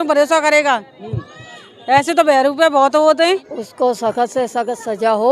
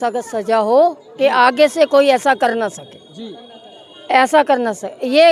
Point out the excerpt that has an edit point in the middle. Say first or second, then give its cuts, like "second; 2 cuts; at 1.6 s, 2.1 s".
first; 1 cut; at 3.6 s